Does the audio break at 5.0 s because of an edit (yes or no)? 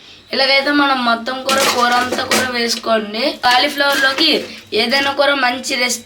no